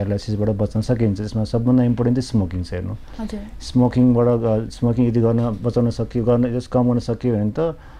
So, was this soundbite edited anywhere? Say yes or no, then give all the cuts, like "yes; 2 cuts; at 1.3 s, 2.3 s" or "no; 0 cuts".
no; 0 cuts